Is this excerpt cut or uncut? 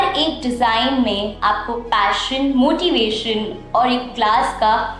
uncut